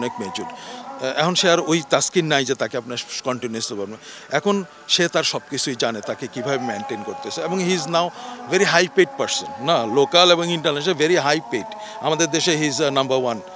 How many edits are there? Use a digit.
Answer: 0